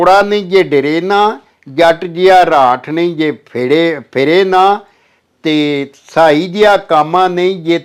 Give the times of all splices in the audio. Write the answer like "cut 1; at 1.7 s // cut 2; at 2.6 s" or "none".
none